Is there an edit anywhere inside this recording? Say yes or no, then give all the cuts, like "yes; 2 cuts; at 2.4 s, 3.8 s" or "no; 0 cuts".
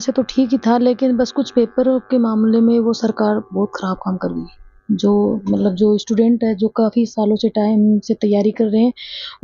no; 0 cuts